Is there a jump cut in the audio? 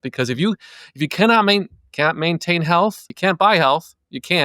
yes; 1 cut; at 3.1 s

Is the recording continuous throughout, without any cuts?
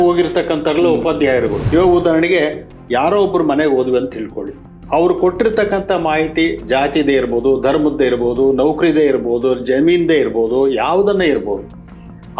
no; 1 cut; at 1.6 s

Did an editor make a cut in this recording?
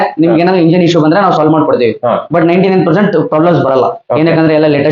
no; 0 cuts

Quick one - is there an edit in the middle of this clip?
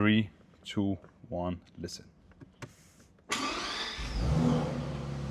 no; 0 cuts

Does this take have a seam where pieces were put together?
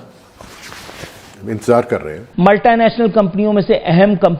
yes; 1 cut; at 2.2 s

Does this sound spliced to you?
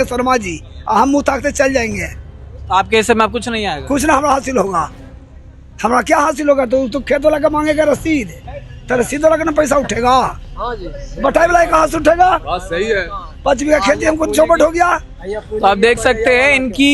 no; 0 cuts

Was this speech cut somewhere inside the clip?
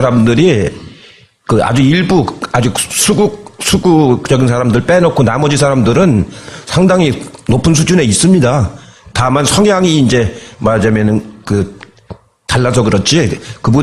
no; 0 cuts

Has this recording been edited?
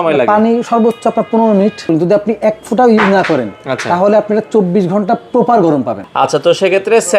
yes; 2 cuts; at 1.9 s, 6.0 s

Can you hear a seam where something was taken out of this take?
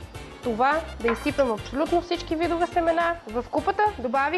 yes; 1 cut; at 3.2 s

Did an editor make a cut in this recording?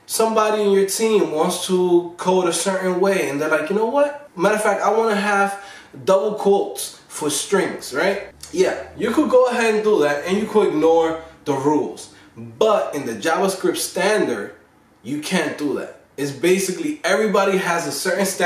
yes; 2 cuts; at 4.2 s, 8.3 s

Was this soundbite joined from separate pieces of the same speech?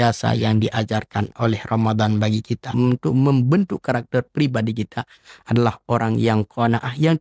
yes; 1 cut; at 2.7 s

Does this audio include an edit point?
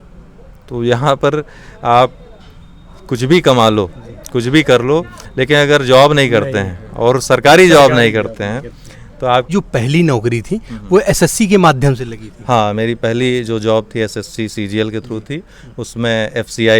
yes; 1 cut; at 9.5 s

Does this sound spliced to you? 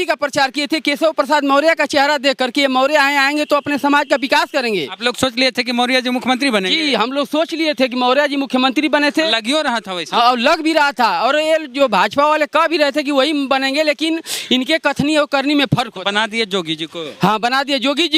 no; 0 cuts

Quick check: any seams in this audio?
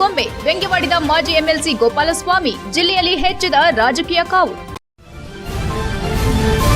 yes; 1 cut; at 4.8 s

